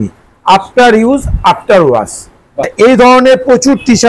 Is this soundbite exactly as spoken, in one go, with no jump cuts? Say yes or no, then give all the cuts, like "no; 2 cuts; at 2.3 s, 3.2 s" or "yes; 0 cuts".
no; 1 cut; at 2.7 s